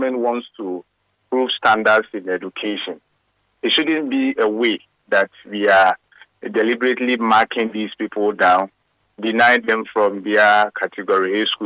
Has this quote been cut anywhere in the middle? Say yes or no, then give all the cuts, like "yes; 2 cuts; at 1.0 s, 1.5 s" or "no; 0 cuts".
yes; 1 cut; at 1.2 s